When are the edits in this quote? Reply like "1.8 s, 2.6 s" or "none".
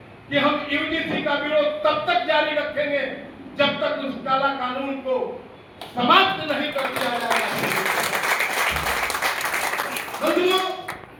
none